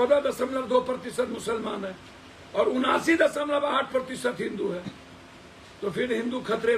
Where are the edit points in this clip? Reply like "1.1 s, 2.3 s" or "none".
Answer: none